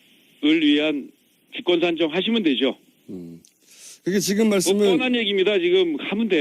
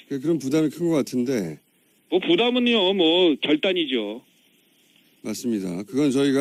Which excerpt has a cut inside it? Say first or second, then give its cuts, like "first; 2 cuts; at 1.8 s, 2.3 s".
first; 1 cut; at 5.4 s